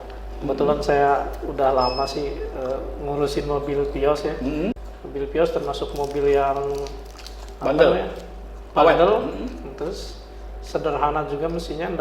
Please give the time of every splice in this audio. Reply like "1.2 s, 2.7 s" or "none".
4.9 s